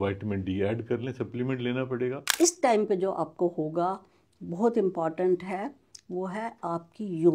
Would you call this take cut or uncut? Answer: cut